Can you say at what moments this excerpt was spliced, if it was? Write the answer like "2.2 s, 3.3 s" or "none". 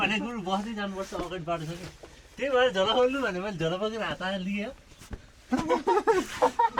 none